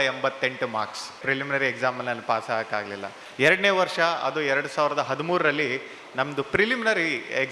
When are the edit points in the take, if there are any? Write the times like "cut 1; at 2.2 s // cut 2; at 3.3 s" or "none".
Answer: cut 1; at 1.2 s // cut 2; at 3.2 s